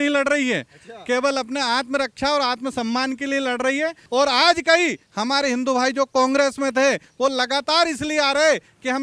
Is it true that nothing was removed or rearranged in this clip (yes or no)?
no